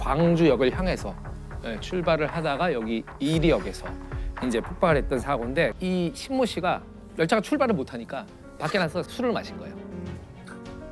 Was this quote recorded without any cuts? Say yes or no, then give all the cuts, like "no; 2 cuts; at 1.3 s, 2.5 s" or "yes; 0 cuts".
no; 1 cut; at 5.8 s